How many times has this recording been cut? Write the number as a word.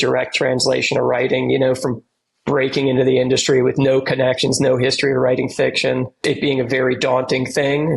one